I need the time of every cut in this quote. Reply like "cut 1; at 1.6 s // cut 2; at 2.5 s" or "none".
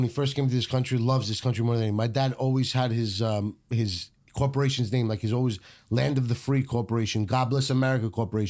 none